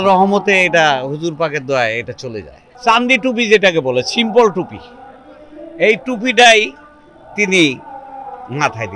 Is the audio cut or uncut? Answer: cut